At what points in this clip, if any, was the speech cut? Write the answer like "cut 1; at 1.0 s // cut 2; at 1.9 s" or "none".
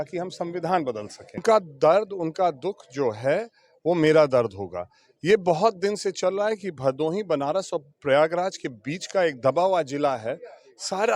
cut 1; at 1.4 s